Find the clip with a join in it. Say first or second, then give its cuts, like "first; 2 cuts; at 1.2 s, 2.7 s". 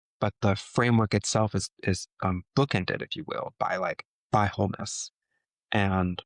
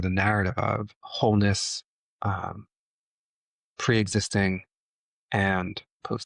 second; 1 cut; at 1.0 s